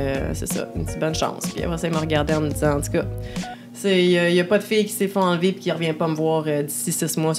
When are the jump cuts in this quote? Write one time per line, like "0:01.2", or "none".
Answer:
none